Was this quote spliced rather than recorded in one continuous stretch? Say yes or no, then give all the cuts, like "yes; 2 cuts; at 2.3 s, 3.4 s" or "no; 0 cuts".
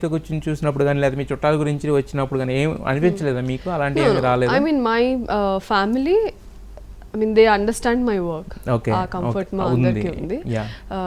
no; 0 cuts